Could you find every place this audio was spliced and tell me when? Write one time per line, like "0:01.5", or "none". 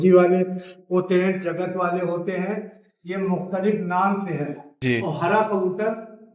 0:04.7